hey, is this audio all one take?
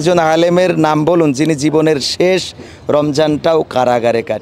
yes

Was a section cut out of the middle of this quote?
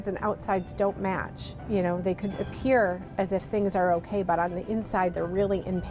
no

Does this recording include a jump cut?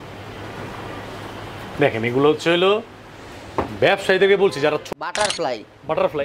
yes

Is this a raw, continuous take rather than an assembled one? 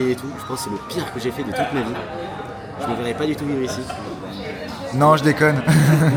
yes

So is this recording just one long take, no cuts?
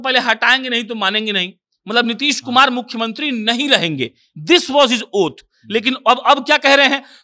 yes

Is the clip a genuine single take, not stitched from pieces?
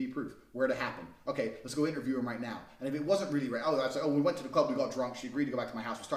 yes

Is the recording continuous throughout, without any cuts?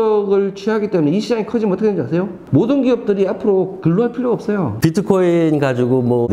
no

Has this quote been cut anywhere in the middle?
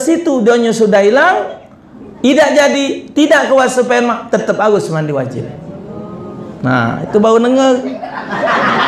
no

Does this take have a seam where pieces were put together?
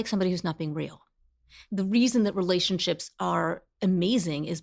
yes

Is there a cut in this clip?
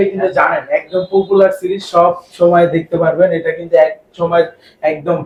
no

